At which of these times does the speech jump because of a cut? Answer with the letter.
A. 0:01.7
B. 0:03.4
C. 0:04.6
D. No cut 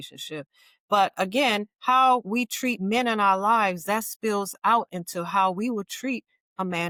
D